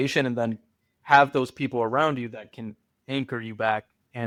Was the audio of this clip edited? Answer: no; 0 cuts

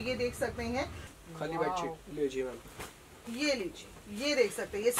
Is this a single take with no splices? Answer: no; 1 cut; at 1.0 s

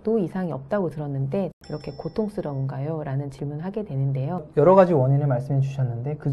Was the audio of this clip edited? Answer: yes; 2 cuts; at 1.6 s, 4.5 s

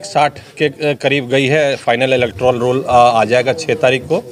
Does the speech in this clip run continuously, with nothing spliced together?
yes; 0 cuts

